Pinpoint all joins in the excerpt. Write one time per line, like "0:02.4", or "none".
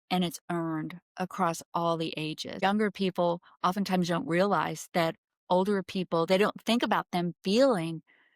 0:02.6